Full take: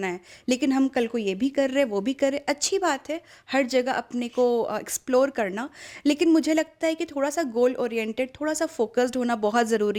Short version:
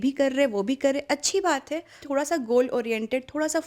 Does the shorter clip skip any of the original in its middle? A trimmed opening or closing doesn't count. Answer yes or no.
yes